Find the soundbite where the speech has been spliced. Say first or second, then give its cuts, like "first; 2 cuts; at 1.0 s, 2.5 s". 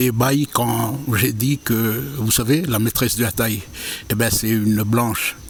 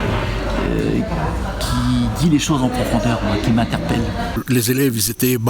second; 1 cut; at 4.3 s